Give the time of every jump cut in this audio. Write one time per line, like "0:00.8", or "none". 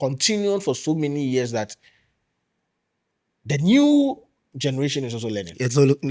none

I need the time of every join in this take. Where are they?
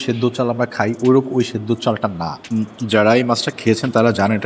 0:02.3

